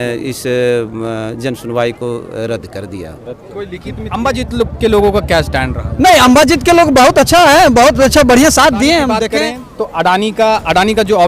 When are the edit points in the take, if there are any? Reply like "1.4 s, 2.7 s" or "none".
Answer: 4.1 s, 9.3 s